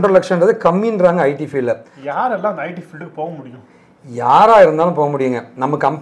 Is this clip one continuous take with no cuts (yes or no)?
no